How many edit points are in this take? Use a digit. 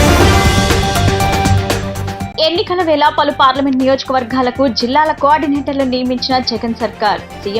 1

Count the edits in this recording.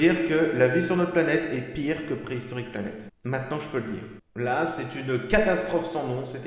1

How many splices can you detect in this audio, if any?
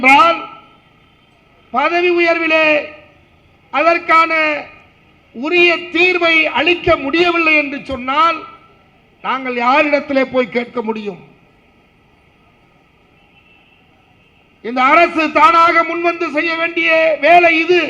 0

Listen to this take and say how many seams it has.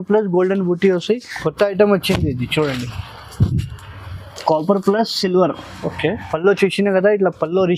1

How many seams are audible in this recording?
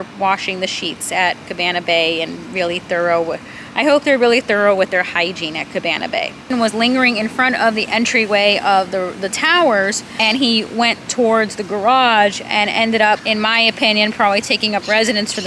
3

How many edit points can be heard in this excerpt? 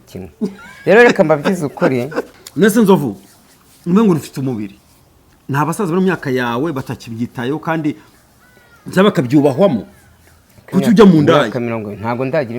1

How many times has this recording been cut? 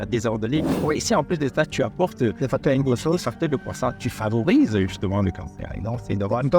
0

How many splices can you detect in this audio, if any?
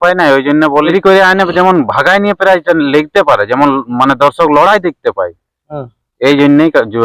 1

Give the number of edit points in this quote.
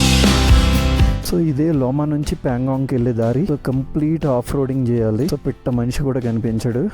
1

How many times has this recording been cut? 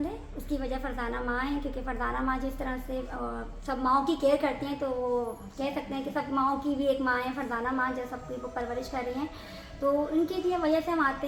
0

